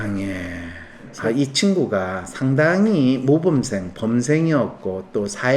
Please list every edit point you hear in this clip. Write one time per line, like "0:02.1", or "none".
0:01.1